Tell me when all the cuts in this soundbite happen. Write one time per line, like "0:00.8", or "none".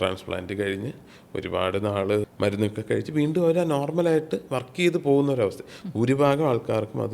0:02.3